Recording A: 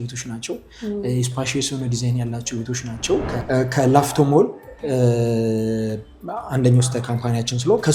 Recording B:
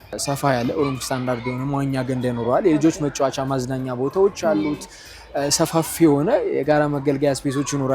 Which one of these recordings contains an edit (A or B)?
A